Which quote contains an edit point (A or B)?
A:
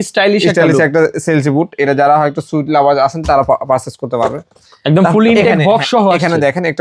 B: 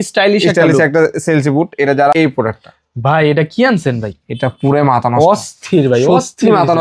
B